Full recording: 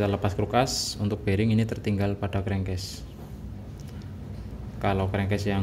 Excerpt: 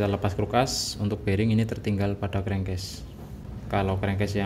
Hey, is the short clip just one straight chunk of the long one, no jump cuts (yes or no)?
no